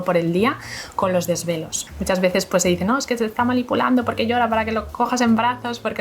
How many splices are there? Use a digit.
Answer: 1